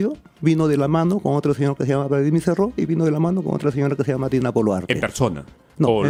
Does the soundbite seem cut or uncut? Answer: uncut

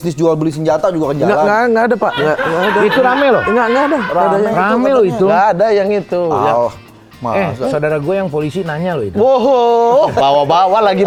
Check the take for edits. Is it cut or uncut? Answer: uncut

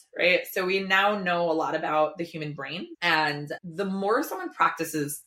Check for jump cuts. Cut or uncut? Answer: uncut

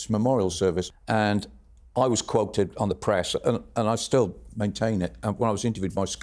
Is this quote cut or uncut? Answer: uncut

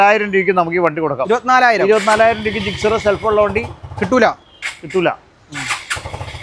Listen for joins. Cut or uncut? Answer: uncut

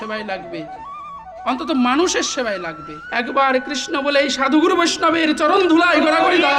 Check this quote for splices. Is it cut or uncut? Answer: cut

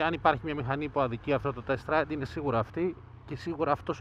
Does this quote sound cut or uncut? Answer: uncut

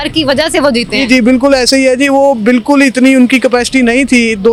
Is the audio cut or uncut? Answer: uncut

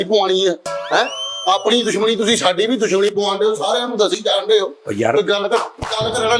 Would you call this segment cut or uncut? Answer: uncut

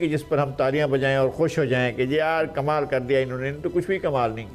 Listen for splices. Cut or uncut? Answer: uncut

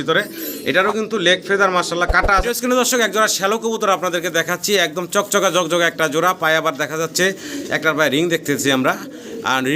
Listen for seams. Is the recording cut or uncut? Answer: cut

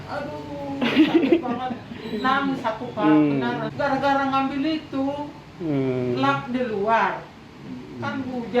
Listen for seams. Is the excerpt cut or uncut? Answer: cut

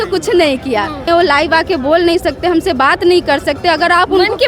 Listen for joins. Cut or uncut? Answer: cut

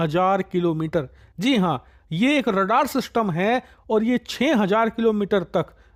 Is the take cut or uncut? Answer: uncut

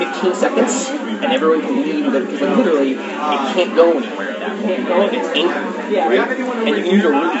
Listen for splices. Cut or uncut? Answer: uncut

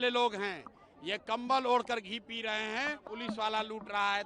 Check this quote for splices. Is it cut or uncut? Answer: cut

